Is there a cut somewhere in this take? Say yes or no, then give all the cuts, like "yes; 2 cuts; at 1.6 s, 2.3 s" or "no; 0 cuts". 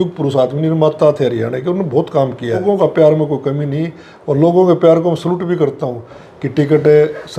yes; 2 cuts; at 2.6 s, 6.2 s